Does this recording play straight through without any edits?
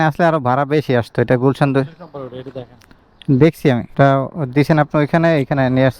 yes; 0 cuts

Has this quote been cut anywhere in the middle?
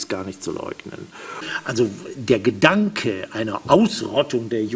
yes; 1 cut; at 1.5 s

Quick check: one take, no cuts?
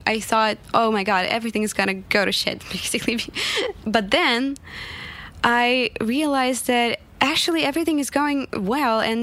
no; 2 cuts; at 2.0 s, 3.8 s

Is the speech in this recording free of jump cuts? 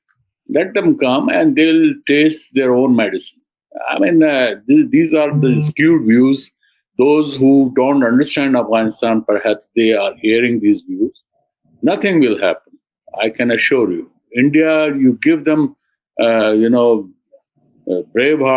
yes; 0 cuts

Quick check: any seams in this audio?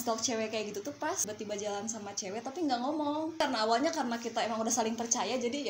yes; 2 cuts; at 1.2 s, 3.4 s

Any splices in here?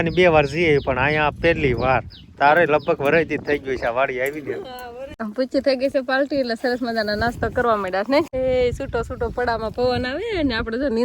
yes; 2 cuts; at 5.2 s, 8.3 s

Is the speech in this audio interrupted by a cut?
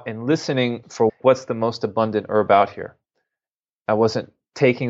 yes; 1 cut; at 1.2 s

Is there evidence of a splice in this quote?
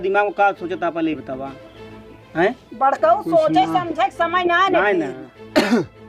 no; 0 cuts

